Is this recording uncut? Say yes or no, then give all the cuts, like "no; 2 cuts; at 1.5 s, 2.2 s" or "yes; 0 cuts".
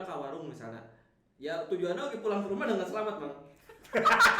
yes; 0 cuts